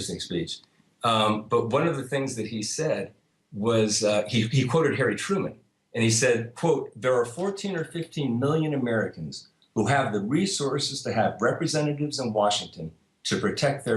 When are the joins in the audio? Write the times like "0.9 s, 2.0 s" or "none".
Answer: 10.5 s